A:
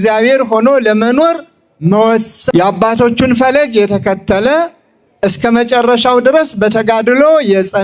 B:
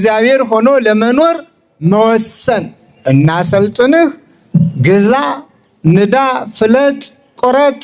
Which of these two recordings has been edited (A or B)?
B